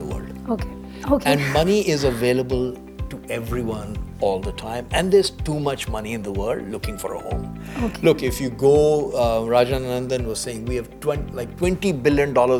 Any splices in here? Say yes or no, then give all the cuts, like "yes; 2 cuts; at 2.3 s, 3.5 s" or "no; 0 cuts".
no; 0 cuts